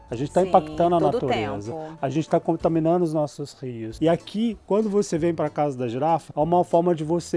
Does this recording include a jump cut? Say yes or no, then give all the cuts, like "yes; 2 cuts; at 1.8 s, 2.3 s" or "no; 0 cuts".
no; 0 cuts